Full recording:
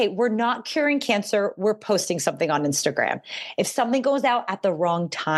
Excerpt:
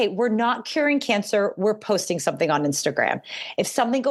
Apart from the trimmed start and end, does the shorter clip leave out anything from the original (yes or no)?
no